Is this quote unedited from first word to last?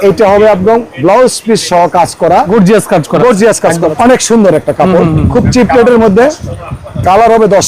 no; 2 cuts; at 2.5 s, 3.9 s

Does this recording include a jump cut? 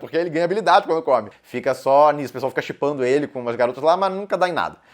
yes; 1 cut; at 1.3 s

